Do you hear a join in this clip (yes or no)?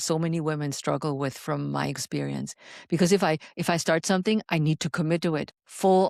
no